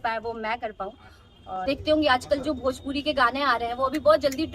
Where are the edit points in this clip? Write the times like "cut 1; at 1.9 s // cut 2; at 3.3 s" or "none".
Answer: cut 1; at 1.6 s

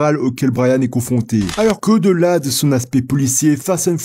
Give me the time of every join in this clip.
cut 1; at 1.5 s

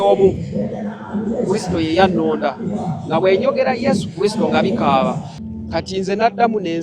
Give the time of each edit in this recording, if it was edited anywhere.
cut 1; at 5.3 s

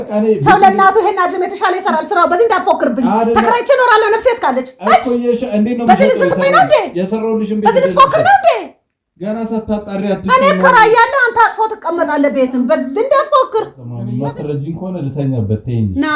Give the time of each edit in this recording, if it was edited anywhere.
none

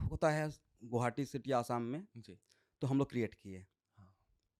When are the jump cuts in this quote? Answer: none

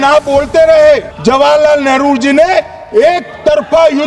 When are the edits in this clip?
cut 1; at 1.1 s

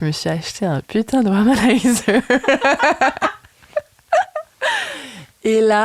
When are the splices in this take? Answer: none

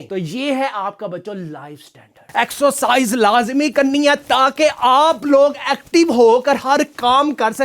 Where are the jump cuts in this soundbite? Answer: cut 1; at 2.2 s

